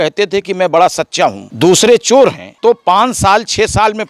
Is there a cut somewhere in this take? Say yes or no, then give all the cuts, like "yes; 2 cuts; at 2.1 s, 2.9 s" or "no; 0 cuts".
yes; 2 cuts; at 1.5 s, 2.5 s